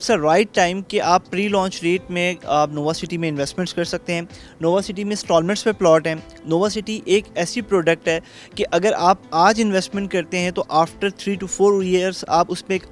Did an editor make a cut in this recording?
no; 0 cuts

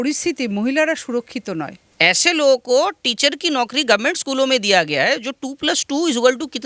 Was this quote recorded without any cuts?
no; 1 cut; at 1.8 s

